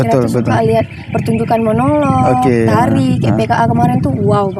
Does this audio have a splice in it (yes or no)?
no